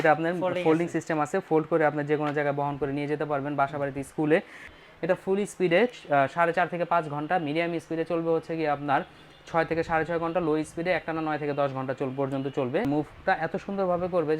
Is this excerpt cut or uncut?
cut